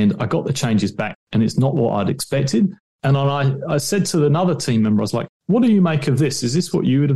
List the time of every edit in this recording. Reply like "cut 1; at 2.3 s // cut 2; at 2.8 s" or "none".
cut 1; at 1.1 s